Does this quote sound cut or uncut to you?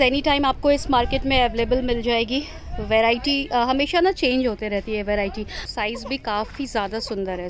cut